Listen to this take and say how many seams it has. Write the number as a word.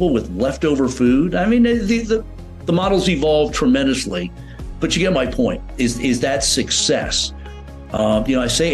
zero